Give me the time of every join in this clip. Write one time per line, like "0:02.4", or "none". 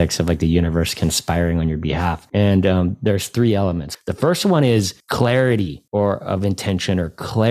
0:02.2
0:05.0
0:05.8